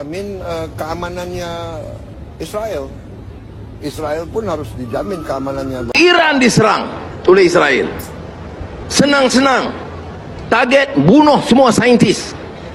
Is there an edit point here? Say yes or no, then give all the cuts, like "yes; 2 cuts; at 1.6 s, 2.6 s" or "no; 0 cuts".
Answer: no; 0 cuts